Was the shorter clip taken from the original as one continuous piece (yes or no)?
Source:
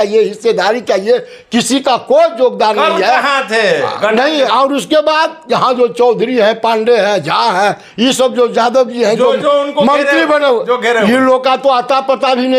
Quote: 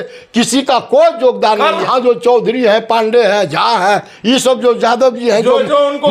no